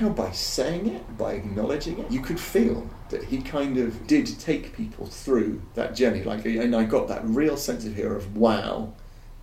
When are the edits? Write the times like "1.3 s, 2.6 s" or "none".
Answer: 2.0 s, 4.0 s, 5.6 s